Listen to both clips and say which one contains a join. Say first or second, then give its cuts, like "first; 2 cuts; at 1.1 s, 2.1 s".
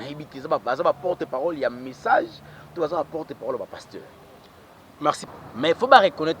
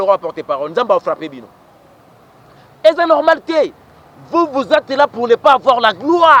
first; 1 cut; at 5.2 s